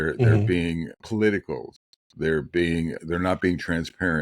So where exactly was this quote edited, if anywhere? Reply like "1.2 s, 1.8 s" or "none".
1.0 s, 2.9 s